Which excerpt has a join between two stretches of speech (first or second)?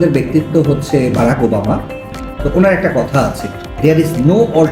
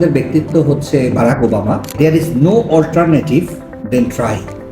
second